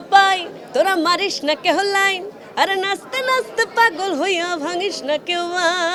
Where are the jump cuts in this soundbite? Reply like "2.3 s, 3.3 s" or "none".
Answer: none

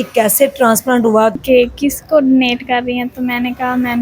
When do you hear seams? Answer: 1.4 s

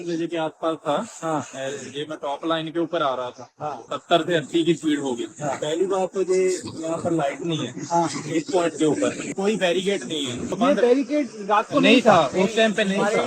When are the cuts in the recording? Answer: 3.9 s, 9.2 s, 10.5 s

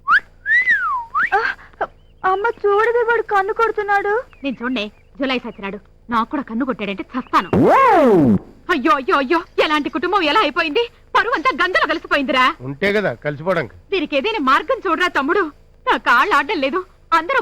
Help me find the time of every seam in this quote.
none

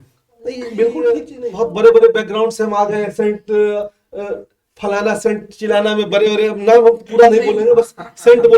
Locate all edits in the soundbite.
1.4 s

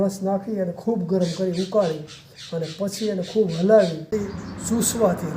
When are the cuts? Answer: 4.1 s

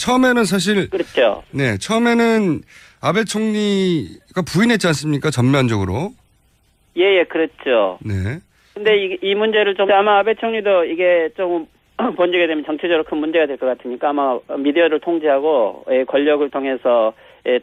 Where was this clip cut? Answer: none

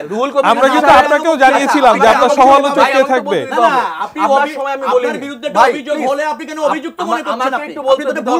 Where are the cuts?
none

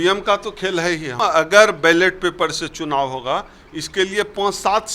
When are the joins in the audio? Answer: 1.1 s

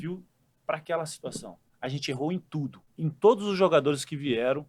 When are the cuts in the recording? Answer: 1.6 s, 2.8 s

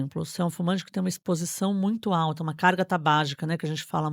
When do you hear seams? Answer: none

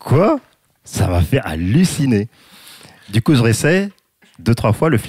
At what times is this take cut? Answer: none

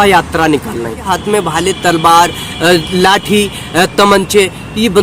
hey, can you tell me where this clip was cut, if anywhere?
1.1 s

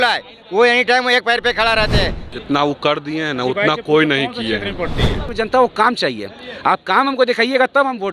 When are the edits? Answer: 2.2 s, 5.2 s

